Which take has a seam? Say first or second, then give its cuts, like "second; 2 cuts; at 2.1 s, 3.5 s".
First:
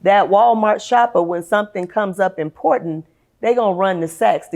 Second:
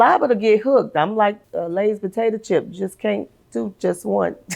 second; 1 cut; at 1.5 s